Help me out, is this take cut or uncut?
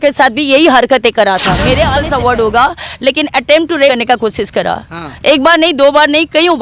cut